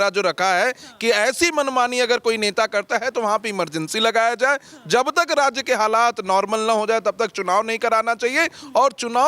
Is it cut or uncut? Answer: uncut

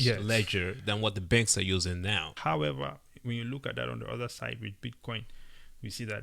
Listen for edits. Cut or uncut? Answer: cut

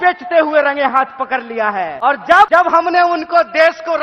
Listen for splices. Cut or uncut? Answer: cut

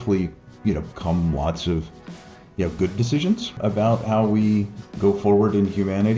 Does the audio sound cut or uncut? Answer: cut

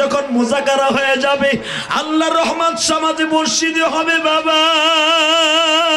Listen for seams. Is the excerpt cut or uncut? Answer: uncut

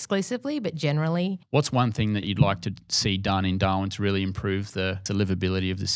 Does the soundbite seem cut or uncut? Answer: cut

